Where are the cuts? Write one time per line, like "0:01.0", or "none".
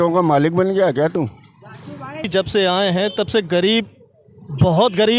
0:02.3